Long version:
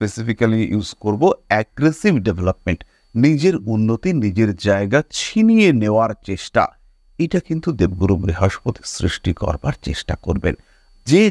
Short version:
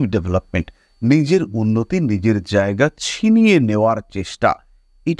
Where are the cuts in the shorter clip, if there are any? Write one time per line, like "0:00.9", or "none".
none